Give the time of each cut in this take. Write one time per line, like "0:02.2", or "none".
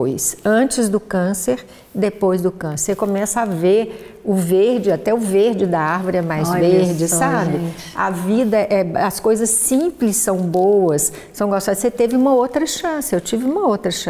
none